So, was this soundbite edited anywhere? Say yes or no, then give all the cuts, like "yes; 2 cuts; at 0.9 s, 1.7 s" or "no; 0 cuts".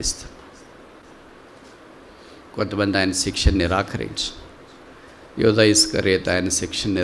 no; 0 cuts